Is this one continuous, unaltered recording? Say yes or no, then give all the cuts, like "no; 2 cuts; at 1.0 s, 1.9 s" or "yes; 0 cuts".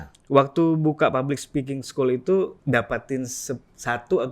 no; 1 cut; at 2.6 s